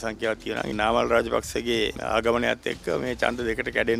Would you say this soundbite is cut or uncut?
cut